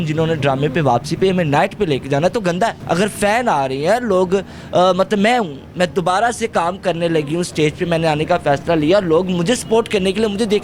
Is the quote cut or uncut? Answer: uncut